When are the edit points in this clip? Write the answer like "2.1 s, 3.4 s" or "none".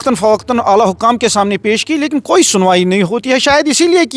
none